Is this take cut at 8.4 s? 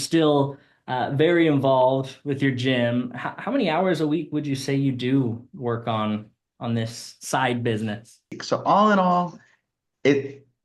yes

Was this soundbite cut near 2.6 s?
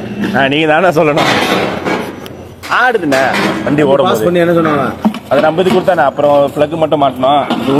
no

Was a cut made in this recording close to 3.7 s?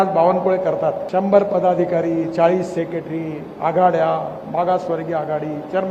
no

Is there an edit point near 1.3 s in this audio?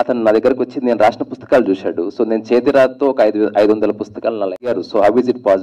no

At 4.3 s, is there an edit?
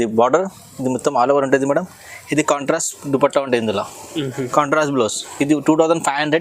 no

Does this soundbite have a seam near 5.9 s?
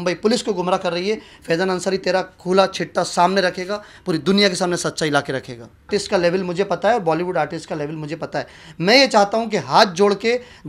yes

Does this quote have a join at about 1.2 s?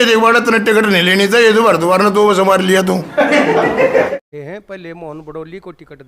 no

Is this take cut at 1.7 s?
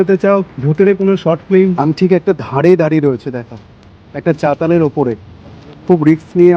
yes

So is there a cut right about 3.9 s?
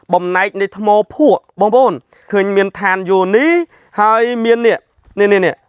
no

